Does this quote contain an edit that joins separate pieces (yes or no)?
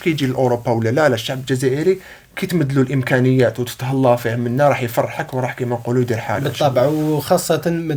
no